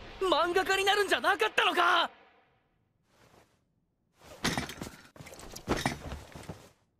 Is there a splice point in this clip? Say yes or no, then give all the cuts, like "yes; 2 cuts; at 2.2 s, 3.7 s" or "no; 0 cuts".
no; 0 cuts